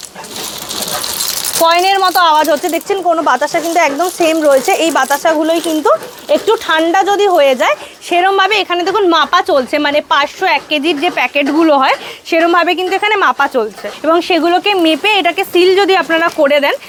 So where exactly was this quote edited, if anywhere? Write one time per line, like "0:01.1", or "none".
none